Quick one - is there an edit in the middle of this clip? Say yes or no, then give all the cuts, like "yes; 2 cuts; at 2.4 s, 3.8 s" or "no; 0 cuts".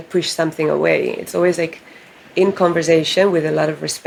no; 0 cuts